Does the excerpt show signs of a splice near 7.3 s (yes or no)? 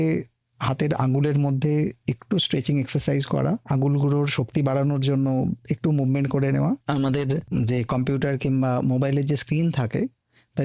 yes